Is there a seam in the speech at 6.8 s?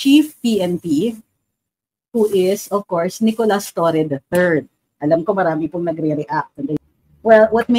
yes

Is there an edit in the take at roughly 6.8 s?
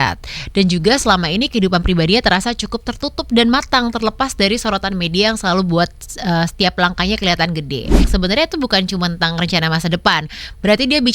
no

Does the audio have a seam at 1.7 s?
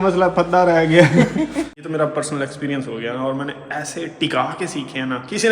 yes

